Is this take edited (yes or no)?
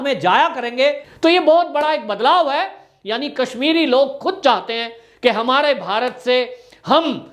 yes